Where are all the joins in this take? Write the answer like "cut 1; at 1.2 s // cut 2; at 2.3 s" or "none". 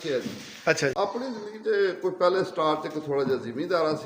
cut 1; at 1.4 s

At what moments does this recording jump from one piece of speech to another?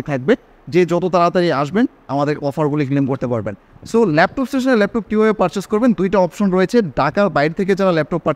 none

